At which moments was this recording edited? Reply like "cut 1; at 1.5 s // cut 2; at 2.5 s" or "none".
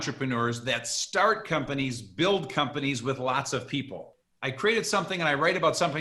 cut 1; at 4.1 s